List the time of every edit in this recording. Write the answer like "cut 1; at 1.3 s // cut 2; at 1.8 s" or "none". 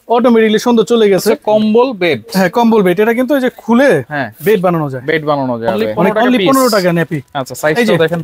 cut 1; at 1.4 s // cut 2; at 6.0 s